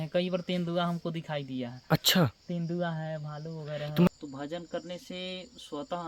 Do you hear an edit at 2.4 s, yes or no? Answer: no